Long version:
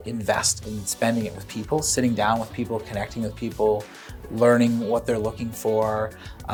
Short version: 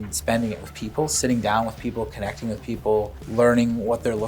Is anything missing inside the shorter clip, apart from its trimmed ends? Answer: yes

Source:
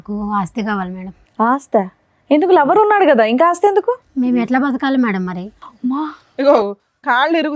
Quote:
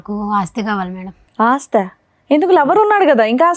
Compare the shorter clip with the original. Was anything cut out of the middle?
no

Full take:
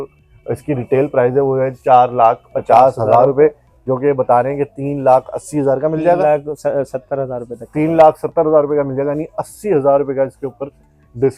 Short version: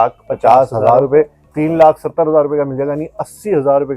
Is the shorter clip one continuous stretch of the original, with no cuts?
no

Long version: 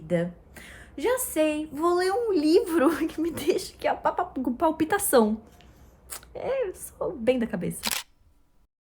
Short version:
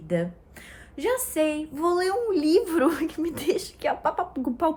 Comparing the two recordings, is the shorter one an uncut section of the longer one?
yes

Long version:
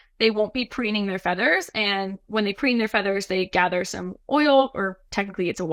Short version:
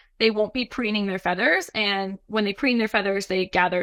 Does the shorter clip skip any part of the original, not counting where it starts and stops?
no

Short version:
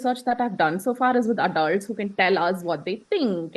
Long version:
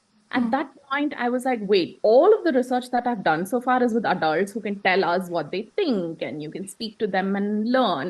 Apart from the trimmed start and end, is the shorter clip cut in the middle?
no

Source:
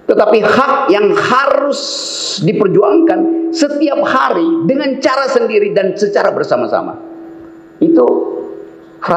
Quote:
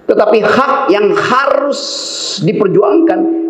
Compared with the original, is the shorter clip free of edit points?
yes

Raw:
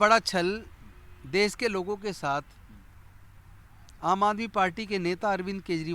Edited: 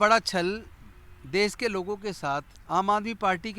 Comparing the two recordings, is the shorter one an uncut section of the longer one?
no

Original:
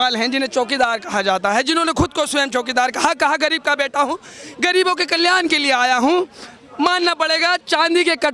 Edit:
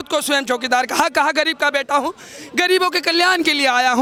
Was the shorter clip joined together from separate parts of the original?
no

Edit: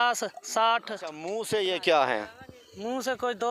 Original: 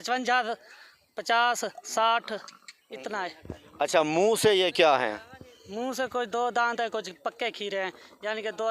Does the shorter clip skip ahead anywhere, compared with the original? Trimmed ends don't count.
yes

